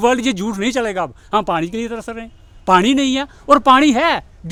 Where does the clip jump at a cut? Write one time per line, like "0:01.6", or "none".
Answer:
none